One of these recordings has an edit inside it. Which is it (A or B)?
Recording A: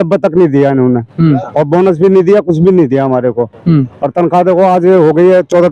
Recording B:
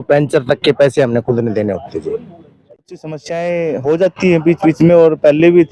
B